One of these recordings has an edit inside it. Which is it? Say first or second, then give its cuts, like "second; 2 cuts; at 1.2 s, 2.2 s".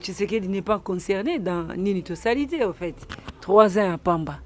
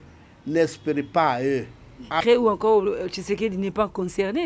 second; 1 cut; at 2.2 s